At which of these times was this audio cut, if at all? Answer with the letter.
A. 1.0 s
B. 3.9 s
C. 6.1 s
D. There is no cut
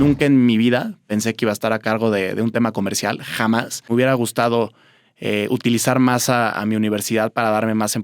B